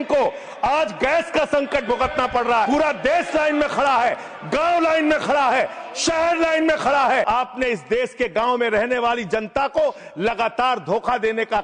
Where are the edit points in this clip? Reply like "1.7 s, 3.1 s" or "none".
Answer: 2.7 s, 7.3 s